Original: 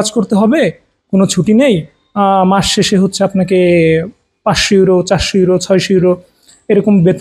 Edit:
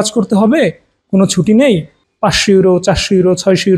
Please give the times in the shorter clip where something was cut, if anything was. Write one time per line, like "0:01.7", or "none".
0:02.0